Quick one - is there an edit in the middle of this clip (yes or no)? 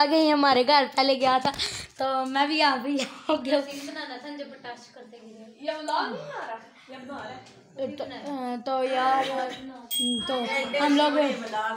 no